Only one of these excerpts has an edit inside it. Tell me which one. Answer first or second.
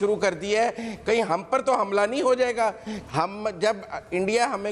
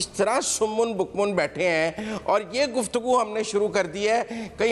first